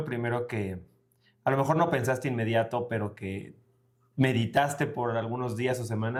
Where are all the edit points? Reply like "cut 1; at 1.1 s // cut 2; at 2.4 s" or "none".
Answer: none